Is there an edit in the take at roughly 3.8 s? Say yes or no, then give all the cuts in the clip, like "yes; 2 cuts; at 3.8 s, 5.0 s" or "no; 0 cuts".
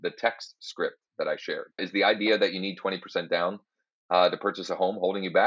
no; 1 cut; at 1.8 s